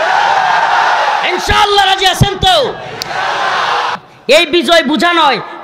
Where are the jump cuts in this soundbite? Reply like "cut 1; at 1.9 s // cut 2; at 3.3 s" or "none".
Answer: cut 1; at 4.0 s